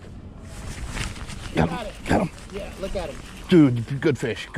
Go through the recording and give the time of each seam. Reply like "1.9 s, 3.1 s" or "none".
3.4 s